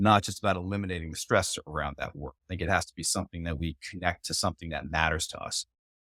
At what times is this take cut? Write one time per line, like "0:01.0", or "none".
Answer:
none